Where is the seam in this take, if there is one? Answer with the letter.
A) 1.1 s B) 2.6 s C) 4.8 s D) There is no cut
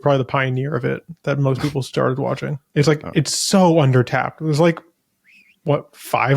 B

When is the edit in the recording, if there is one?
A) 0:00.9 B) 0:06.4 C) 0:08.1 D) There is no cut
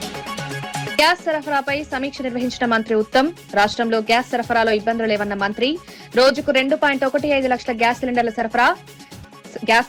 A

